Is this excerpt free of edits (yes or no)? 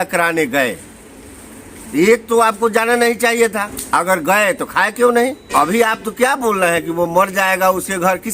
no